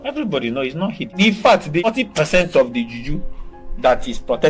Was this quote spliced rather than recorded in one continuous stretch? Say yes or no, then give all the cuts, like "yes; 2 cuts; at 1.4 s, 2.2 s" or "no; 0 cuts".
yes; 2 cuts; at 1.1 s, 1.8 s